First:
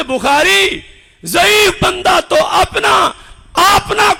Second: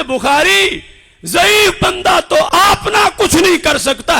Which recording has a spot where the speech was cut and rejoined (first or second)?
second